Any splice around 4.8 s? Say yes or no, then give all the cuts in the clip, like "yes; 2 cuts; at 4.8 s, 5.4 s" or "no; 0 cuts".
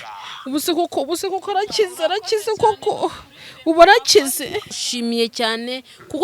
yes; 1 cut; at 4.8 s